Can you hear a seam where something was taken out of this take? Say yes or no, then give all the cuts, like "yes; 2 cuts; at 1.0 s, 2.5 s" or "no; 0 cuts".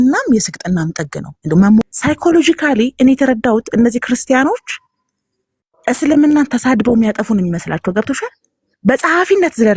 yes; 1 cut; at 1.9 s